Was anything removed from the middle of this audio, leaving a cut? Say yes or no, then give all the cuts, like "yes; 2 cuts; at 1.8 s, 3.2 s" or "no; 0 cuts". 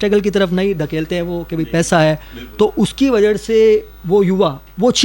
no; 0 cuts